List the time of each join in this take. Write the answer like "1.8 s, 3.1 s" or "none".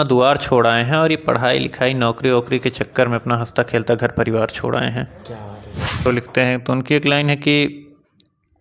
6.0 s